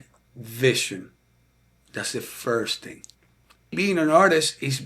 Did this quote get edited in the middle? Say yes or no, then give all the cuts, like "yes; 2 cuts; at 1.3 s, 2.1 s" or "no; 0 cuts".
yes; 1 cut; at 3.8 s